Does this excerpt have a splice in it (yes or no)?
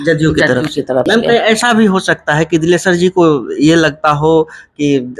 yes